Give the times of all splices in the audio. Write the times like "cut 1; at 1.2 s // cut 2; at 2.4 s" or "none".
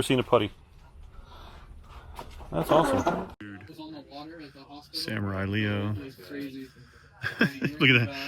cut 1; at 3.7 s